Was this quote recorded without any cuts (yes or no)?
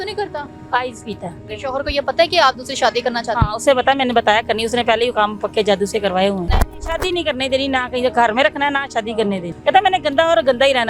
no